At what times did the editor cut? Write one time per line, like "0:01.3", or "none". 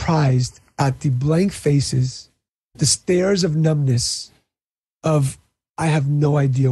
0:02.7